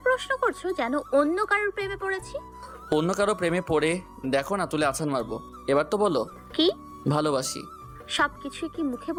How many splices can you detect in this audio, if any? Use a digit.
0